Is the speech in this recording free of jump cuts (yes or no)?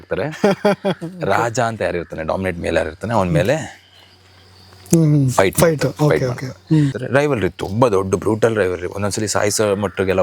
no